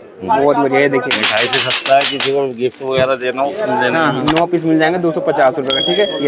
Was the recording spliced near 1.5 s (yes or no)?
no